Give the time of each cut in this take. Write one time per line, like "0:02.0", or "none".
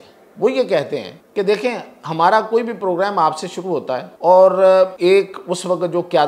0:01.2
0:04.1
0:04.9